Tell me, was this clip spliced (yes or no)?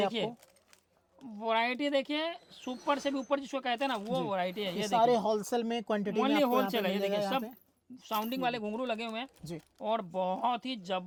no